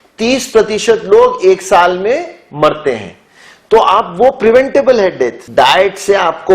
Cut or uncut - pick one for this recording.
cut